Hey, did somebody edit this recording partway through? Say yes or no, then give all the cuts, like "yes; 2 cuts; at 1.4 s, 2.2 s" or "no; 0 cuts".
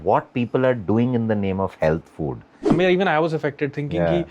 yes; 1 cut; at 2.7 s